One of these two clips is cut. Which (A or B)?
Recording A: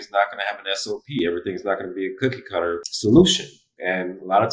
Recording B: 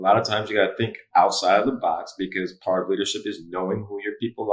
A